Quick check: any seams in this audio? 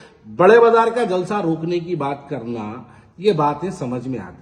no; 0 cuts

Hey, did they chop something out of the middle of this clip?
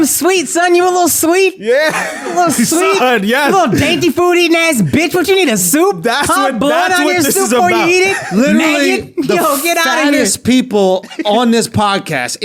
no; 0 cuts

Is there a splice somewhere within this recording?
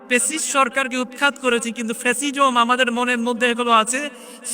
no; 0 cuts

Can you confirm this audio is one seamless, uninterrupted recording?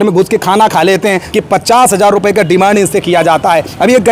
no; 1 cut; at 1.2 s

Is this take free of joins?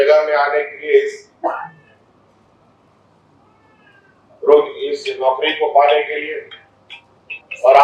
yes; 0 cuts

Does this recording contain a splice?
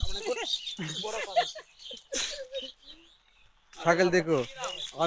no; 0 cuts

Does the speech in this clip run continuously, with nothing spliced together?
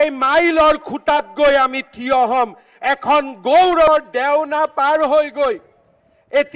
no; 1 cut; at 3.9 s

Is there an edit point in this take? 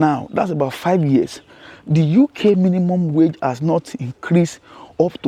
no; 0 cuts

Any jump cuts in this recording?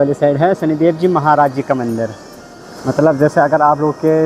no; 0 cuts

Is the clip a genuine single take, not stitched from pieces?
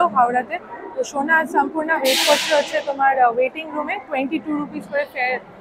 yes; 0 cuts

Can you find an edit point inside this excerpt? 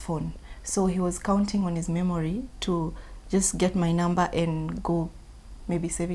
no; 0 cuts

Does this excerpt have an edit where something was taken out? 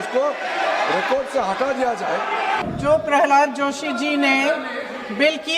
yes; 1 cut; at 2.7 s

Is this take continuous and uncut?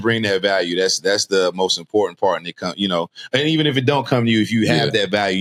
yes; 0 cuts

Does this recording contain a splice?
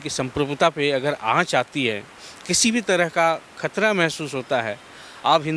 no; 0 cuts

